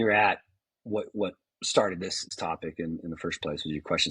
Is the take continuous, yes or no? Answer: no